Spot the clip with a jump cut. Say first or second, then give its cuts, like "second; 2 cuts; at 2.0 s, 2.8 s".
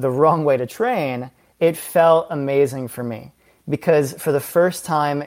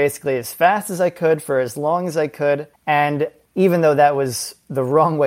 second; 2 cuts; at 2.7 s, 3.4 s